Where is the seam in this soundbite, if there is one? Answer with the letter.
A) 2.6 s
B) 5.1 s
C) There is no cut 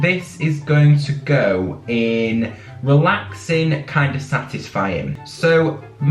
B